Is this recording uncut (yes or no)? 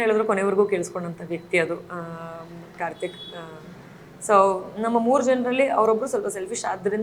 yes